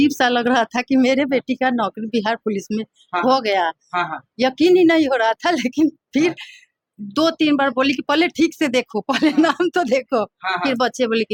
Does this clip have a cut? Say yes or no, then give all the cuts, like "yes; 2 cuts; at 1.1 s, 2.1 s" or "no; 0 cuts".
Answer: no; 0 cuts